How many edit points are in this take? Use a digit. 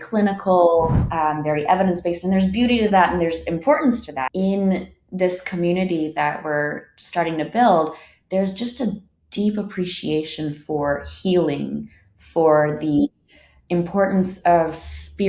1